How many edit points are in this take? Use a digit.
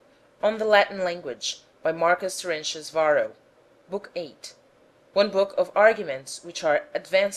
1